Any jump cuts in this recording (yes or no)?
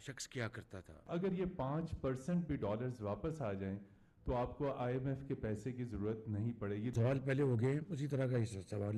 yes